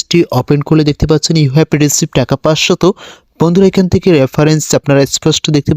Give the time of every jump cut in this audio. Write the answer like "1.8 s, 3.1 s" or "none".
none